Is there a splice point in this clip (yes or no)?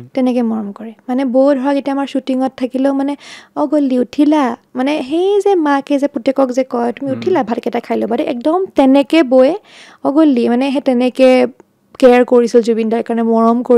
no